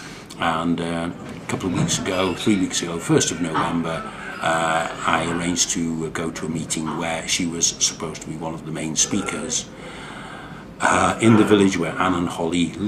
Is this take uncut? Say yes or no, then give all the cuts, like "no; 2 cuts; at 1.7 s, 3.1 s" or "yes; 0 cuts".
no; 1 cut; at 1.4 s